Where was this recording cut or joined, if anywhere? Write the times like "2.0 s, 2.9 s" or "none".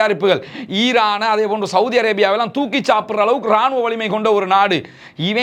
none